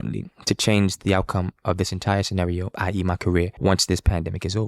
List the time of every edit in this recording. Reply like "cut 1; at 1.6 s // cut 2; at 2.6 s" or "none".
cut 1; at 2.7 s // cut 2; at 3.5 s

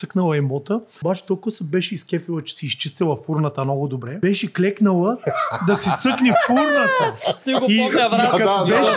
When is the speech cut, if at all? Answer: cut 1; at 0.9 s // cut 2; at 4.2 s

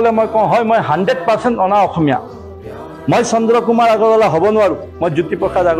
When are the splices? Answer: none

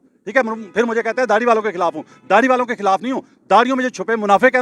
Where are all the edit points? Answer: none

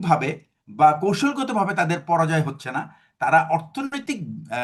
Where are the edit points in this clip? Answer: none

